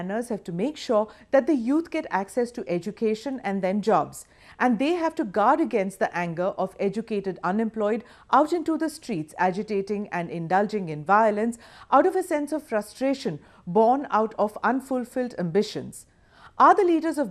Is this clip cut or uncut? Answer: cut